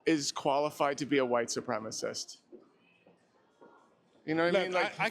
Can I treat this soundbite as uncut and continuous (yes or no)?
yes